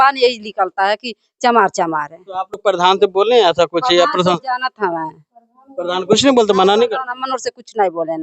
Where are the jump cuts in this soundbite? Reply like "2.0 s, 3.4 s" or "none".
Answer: none